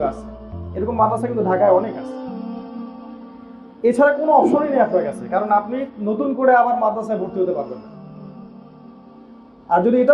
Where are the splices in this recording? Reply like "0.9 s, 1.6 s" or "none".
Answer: 2.0 s, 3.7 s, 7.7 s, 9.1 s